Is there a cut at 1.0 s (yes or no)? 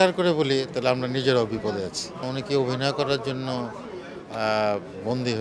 no